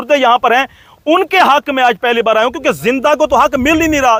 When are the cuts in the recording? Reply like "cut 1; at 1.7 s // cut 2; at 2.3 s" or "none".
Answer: none